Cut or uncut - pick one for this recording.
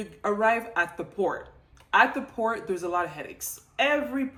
uncut